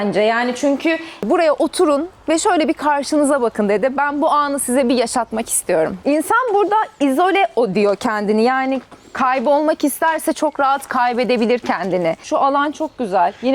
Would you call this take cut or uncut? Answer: cut